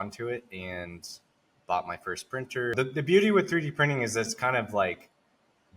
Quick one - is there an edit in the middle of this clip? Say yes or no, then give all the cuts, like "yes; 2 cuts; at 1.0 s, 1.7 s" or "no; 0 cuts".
yes; 1 cut; at 2.7 s